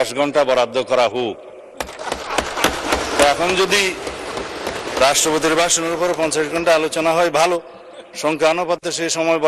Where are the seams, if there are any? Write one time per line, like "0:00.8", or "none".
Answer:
none